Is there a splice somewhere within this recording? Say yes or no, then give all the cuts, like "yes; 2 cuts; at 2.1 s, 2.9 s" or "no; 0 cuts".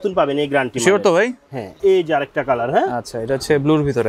yes; 1 cut; at 1.7 s